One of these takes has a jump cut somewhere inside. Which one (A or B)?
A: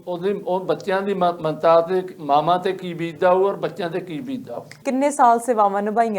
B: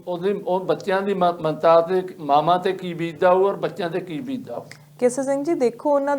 A